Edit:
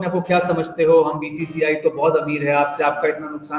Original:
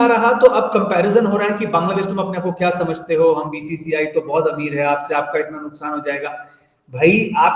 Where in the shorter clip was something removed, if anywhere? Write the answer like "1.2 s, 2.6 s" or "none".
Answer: none